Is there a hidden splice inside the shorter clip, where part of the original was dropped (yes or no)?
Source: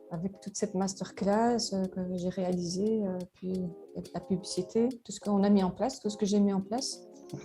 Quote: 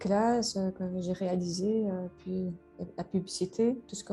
no